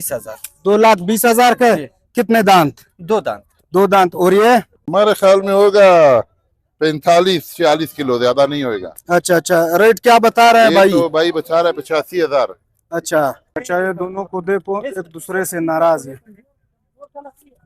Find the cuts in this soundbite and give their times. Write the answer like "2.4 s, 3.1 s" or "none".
4.8 s, 13.5 s